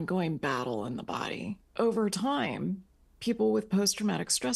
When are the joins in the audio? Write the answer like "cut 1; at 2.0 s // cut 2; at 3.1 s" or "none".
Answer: cut 1; at 1.7 s